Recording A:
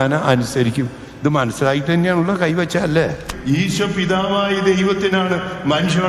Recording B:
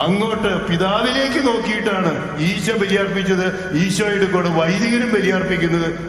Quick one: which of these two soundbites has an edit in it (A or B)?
A